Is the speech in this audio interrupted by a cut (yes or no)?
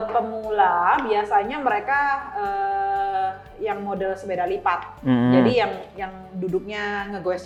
no